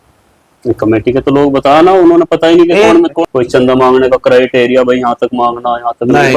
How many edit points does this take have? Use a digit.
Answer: 1